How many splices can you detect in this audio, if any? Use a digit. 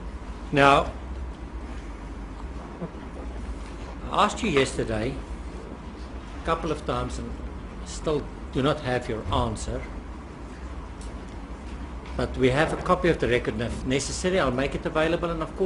1